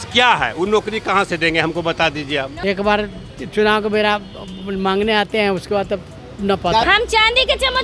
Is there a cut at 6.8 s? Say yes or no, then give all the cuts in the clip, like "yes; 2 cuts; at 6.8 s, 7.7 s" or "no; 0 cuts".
yes; 2 cuts; at 2.5 s, 6.8 s